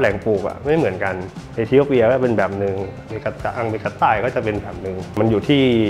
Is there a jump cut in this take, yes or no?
no